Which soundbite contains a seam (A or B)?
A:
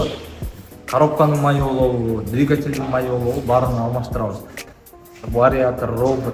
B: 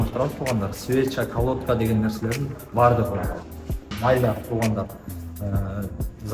B